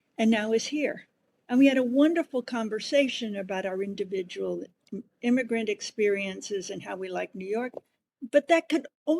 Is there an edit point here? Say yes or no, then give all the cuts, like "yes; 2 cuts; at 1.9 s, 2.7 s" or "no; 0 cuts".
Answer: no; 0 cuts